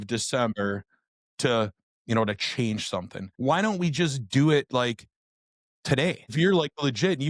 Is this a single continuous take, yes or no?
no